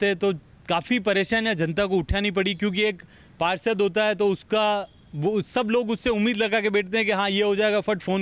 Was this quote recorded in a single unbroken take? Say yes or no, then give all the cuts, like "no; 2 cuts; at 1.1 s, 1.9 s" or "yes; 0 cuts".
yes; 0 cuts